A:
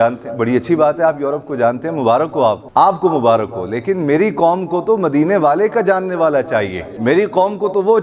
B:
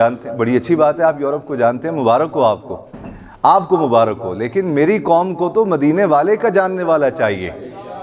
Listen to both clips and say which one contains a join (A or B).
A